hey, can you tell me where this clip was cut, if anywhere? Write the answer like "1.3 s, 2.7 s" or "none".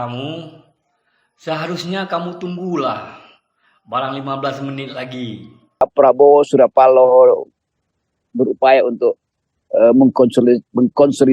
5.8 s